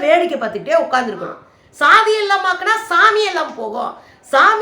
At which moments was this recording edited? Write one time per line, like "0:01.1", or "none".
0:01.4